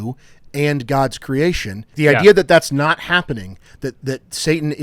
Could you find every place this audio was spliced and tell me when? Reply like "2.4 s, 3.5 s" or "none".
1.9 s

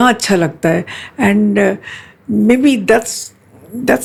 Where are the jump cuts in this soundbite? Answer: none

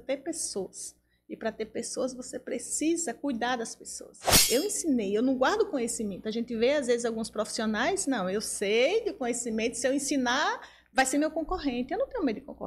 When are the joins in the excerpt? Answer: 4.3 s

